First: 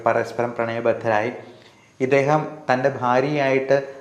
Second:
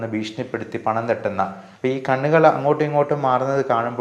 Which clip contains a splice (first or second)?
second